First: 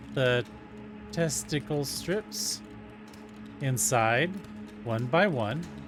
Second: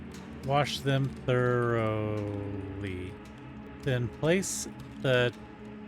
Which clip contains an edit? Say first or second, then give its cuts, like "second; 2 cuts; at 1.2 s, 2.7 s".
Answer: second; 1 cut; at 3.7 s